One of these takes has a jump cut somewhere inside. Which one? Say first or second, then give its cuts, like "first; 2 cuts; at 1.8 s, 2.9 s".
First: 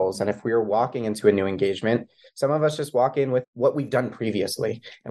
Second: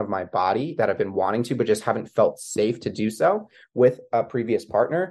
first; 1 cut; at 3.4 s